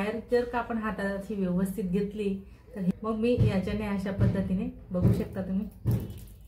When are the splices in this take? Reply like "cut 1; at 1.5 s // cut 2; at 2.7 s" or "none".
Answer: cut 1; at 2.9 s